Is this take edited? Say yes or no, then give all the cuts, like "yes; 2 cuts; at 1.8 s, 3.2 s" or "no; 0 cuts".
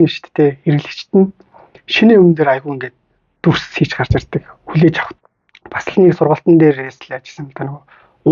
yes; 1 cut; at 5.1 s